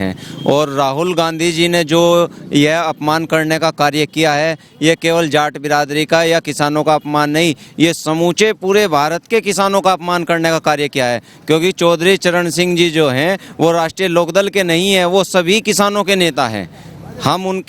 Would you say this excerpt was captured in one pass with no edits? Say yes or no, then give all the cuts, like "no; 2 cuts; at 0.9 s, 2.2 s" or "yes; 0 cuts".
yes; 0 cuts